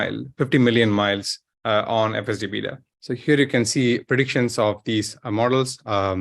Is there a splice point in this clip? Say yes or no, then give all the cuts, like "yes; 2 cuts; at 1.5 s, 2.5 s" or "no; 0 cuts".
yes; 1 cut; at 2.8 s